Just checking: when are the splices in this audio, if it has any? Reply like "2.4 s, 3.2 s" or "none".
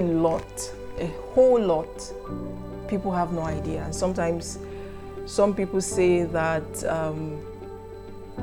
none